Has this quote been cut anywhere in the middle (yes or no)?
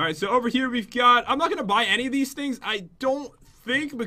no